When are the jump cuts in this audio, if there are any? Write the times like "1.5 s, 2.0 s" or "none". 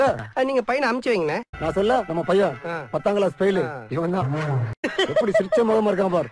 none